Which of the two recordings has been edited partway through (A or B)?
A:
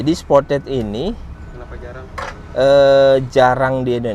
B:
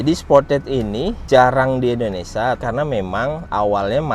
B